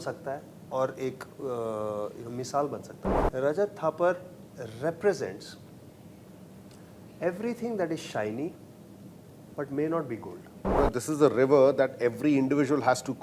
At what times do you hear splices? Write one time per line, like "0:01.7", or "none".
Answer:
0:02.9
0:10.8